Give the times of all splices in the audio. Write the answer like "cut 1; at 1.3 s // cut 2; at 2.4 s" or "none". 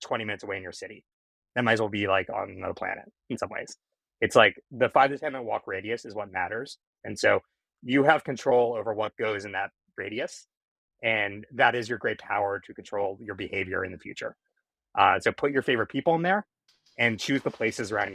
cut 1; at 7.0 s